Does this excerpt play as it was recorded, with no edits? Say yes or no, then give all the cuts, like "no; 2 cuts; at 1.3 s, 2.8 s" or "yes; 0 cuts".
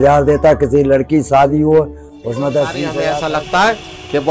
no; 1 cut; at 3.1 s